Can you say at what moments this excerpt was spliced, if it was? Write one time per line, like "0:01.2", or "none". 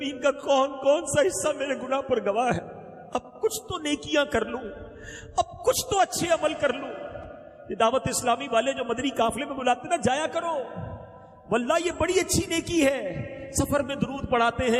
none